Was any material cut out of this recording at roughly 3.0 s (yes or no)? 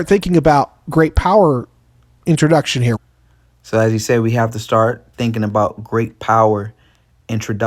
no